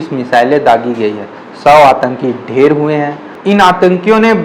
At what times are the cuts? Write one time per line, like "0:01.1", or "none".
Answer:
0:03.4